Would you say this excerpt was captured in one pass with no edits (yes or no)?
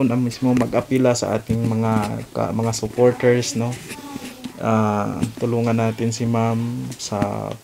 yes